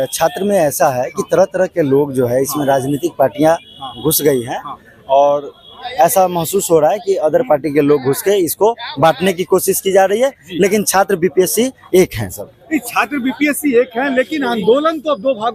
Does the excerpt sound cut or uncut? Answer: uncut